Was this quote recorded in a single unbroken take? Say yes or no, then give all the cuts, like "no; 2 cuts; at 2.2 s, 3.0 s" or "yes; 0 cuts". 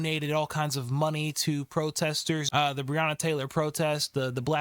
no; 1 cut; at 2.5 s